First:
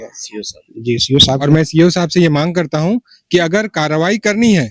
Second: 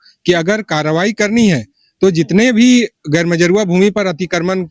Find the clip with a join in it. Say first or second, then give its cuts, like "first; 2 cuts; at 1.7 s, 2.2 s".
first; 1 cut; at 1.4 s